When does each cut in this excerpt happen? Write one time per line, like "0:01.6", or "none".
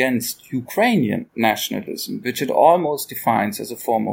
0:01.3